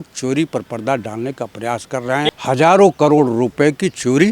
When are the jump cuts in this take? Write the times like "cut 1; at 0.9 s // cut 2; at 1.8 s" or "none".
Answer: cut 1; at 2.2 s